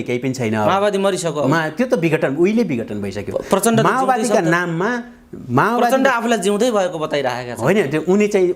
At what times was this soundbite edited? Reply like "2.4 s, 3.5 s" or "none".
none